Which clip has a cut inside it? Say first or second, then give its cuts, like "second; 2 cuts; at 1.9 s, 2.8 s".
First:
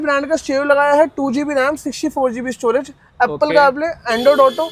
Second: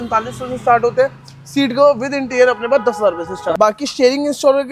second; 1 cut; at 3.4 s